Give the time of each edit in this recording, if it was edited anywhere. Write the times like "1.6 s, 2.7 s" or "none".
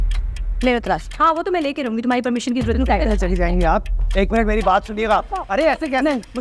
none